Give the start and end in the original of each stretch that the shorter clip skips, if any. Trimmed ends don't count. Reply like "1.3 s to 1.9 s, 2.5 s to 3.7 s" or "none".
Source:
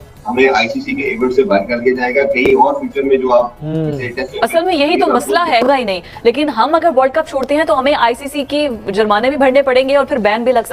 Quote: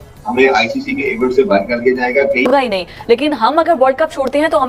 2.4 s to 5.6 s